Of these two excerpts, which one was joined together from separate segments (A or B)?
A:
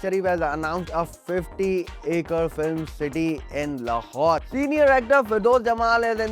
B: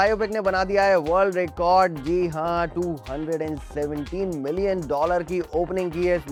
A